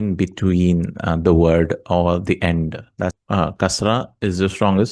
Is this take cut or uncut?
cut